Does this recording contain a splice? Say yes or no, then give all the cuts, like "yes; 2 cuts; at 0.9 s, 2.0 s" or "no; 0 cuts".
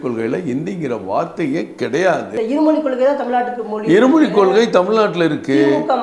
yes; 1 cut; at 2.3 s